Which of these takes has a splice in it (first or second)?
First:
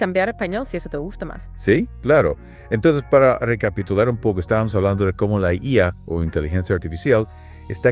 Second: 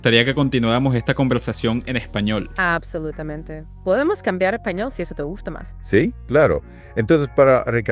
second